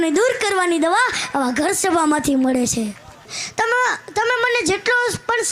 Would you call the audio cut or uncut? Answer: cut